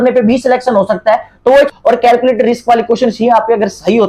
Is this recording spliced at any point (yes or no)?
yes